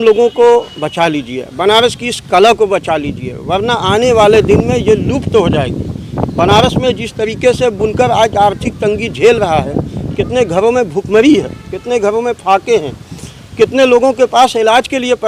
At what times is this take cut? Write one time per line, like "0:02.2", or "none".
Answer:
none